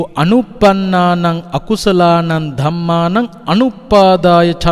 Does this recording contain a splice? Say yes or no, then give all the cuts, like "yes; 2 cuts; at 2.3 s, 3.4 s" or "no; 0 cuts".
no; 0 cuts